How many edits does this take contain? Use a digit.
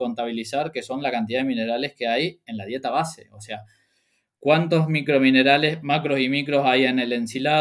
0